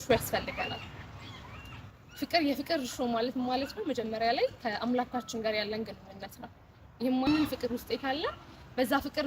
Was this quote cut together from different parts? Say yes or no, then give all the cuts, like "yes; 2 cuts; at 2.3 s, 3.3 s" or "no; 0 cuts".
yes; 1 cut; at 7.3 s